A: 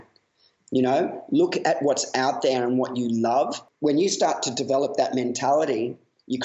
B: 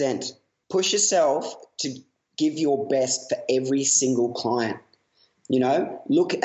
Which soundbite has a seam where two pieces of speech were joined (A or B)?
A